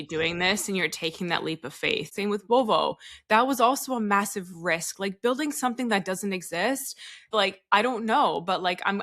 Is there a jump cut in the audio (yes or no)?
yes